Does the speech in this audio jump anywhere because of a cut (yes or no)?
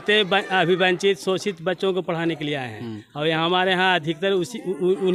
no